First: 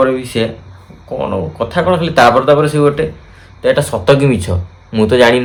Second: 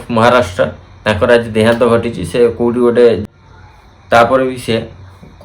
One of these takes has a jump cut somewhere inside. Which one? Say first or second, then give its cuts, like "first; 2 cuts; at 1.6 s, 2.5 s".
second; 1 cut; at 3.2 s